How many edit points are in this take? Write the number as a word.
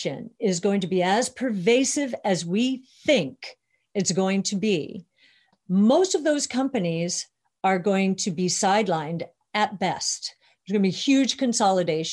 one